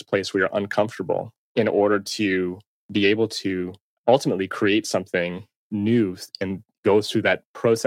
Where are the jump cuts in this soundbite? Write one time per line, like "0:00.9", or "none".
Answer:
0:01.4
0:03.8
0:05.7